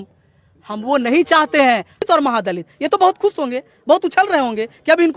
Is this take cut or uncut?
cut